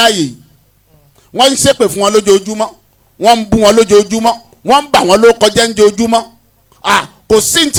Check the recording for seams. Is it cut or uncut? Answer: uncut